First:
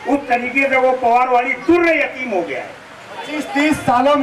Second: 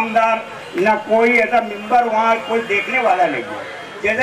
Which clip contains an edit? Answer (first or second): first